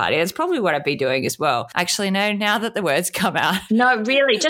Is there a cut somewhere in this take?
yes; 2 cuts; at 1.7 s, 3.6 s

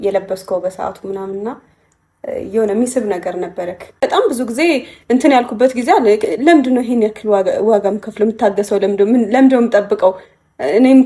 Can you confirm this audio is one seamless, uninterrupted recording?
no; 1 cut; at 4.0 s

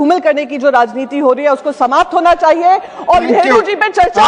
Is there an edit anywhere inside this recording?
yes; 1 cut; at 3.2 s

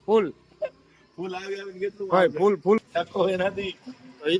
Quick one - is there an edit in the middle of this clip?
yes; 1 cut; at 2.8 s

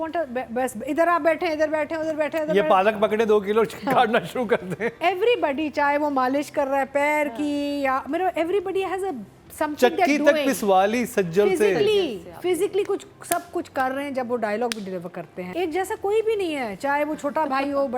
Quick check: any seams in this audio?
yes; 1 cut; at 15.4 s

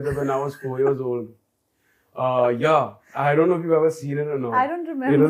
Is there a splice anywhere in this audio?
no; 0 cuts

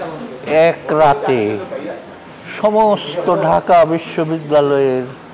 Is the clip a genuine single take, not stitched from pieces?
yes; 0 cuts

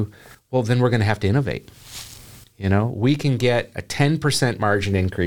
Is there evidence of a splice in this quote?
no; 0 cuts

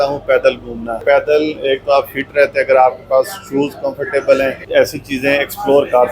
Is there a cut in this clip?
yes; 2 cuts; at 1.0 s, 4.6 s

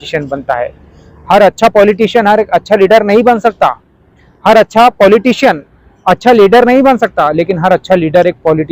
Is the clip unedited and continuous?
yes; 0 cuts

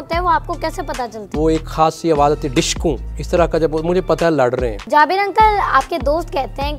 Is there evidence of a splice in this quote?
yes; 3 cuts; at 1.3 s, 3.1 s, 4.8 s

